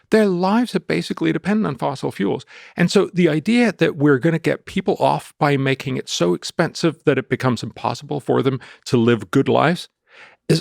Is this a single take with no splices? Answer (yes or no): yes